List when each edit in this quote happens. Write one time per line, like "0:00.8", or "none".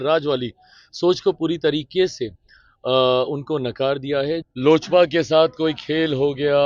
0:04.4